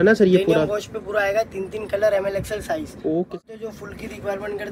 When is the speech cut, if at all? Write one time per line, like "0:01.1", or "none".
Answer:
0:03.3